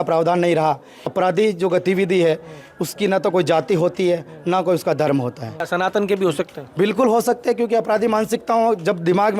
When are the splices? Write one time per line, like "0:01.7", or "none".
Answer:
0:01.1
0:05.6